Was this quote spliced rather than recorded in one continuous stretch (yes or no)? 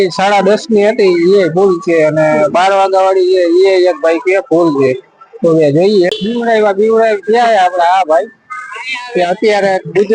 yes